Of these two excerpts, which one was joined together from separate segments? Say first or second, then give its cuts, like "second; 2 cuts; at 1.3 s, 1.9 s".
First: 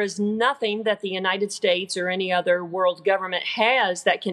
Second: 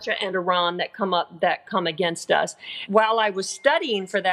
second; 1 cut; at 2.8 s